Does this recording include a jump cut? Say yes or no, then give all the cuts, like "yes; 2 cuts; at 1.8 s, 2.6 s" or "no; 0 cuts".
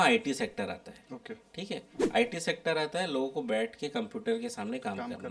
no; 0 cuts